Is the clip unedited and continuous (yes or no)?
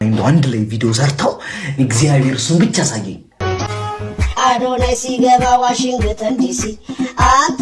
no